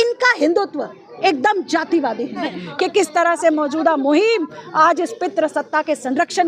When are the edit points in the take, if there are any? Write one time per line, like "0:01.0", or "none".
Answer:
0:02.5